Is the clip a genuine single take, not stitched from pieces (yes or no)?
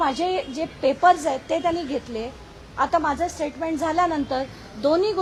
yes